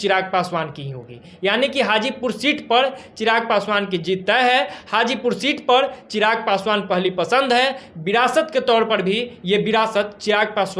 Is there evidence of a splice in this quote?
no; 0 cuts

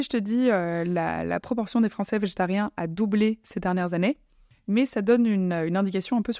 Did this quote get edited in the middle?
yes; 1 cut; at 4.5 s

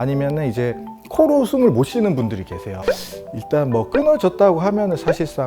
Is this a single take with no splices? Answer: no; 1 cut; at 2.8 s

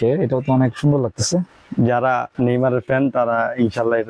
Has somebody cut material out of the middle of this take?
no; 0 cuts

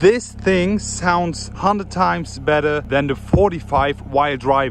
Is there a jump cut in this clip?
yes; 2 cuts; at 1.4 s, 2.8 s

